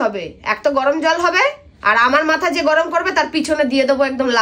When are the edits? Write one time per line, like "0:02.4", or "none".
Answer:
none